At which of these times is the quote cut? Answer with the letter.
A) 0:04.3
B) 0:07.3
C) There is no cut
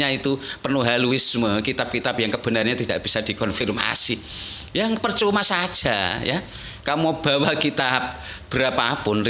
C